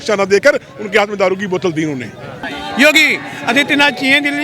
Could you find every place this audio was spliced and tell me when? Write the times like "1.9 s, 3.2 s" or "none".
2.4 s